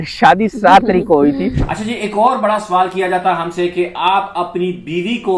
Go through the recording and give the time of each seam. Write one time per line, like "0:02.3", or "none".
0:01.6